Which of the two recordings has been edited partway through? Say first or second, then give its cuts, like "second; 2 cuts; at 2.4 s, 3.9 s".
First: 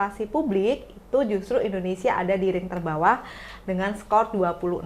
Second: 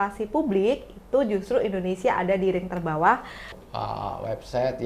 second; 1 cut; at 3.6 s